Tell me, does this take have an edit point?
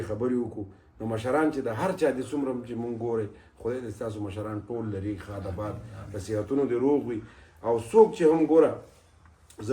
no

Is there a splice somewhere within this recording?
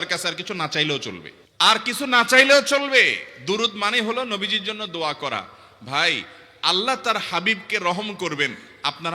no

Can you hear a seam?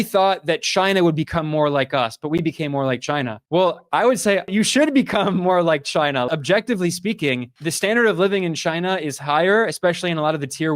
yes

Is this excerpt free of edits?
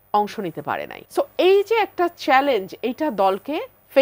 no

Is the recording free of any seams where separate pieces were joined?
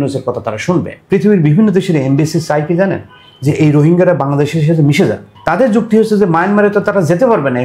no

